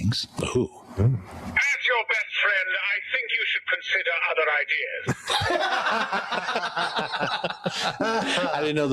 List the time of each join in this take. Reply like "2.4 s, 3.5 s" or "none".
none